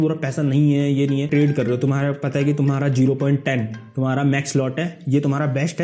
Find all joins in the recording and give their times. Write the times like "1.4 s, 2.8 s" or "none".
1.3 s